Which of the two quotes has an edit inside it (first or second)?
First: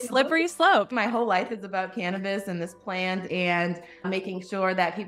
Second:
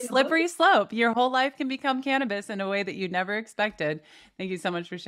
first